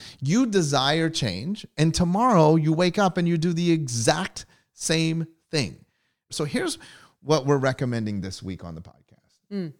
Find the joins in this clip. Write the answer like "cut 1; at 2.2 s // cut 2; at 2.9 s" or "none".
cut 1; at 6.3 s